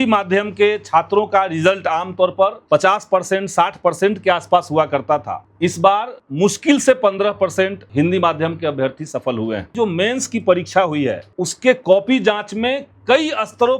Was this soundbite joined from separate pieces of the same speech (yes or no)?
yes